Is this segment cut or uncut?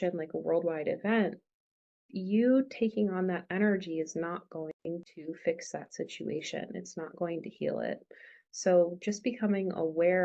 uncut